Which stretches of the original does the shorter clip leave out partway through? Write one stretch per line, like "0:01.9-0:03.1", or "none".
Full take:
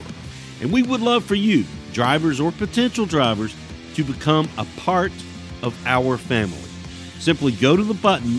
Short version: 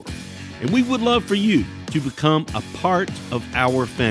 0:01.8-0:03.8
0:05.2-0:05.5

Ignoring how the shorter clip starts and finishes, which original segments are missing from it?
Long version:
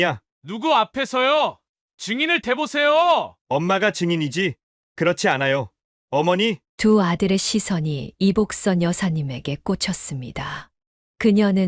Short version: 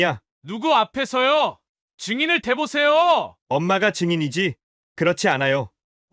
none

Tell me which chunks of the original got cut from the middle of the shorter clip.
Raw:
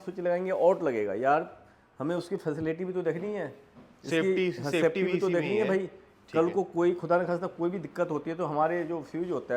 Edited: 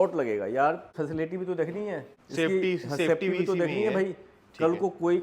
0:01.6-0:02.4
0:03.6-0:03.9

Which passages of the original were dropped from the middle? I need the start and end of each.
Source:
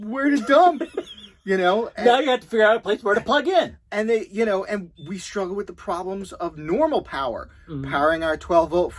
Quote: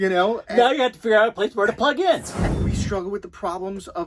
0:03.9-0:04.9

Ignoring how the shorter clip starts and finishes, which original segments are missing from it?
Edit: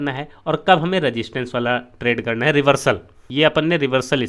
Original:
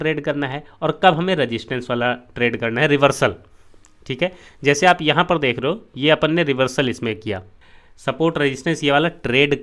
0:03.6-0:05.9

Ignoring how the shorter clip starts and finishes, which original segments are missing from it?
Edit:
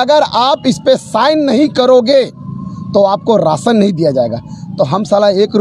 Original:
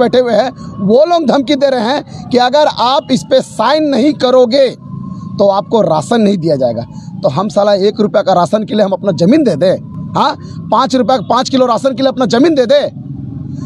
none

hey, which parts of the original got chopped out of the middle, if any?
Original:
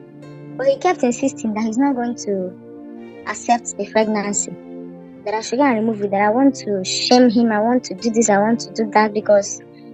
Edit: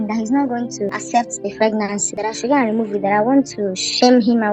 0:02.4-0:03.2
0:04.4-0:05.2

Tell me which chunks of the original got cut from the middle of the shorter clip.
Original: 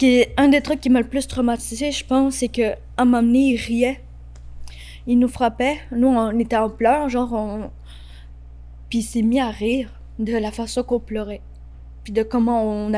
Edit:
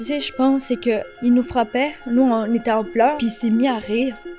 0:02.8-0:05.0
0:07.0-0:08.9

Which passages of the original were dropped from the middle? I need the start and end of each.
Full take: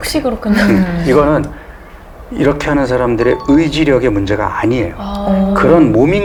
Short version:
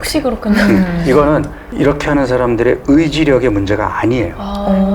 0:01.6-0:02.2

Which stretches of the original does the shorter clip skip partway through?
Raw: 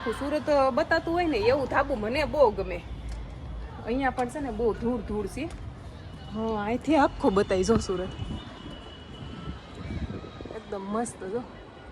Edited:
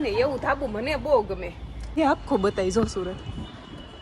0:03.2-0:06.8

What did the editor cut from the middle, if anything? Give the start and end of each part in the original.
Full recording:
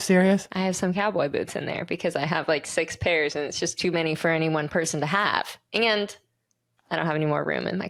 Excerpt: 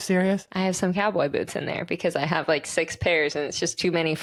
none

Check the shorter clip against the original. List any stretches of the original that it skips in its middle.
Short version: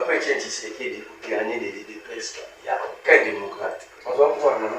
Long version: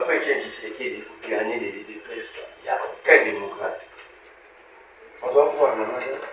0:03.9-0:05.1

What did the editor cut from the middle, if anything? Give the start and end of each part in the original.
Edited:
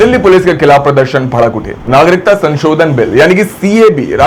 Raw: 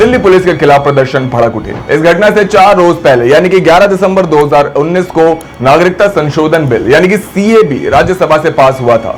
0:01.8-0:05.5

